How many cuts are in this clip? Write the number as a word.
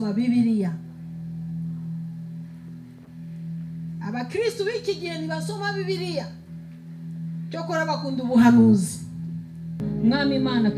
one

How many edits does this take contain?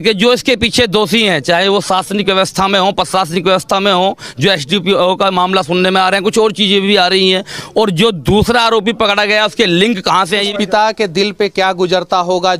one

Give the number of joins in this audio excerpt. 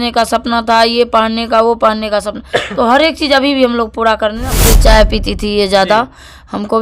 one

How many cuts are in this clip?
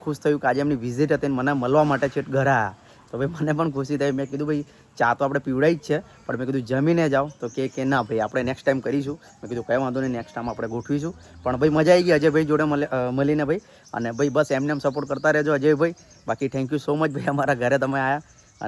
zero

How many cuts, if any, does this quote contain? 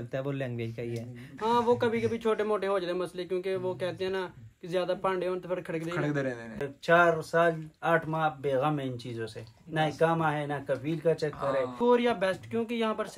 three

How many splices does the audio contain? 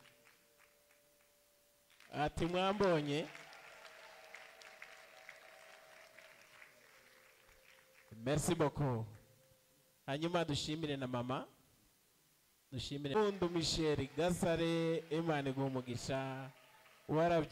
one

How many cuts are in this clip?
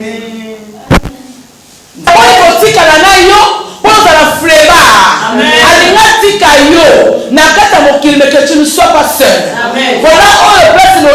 one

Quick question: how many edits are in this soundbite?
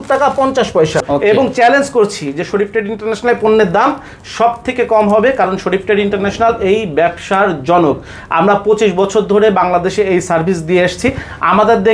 zero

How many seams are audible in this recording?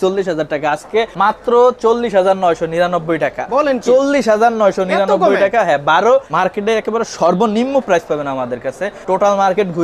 three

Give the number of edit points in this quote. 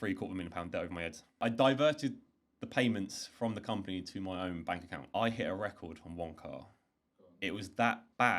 two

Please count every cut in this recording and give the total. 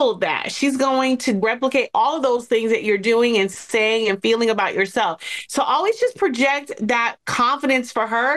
one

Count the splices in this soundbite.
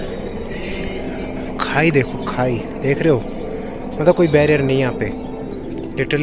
zero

